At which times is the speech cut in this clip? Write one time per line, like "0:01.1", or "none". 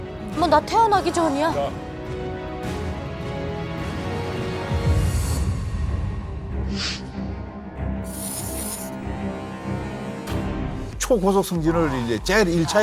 0:10.9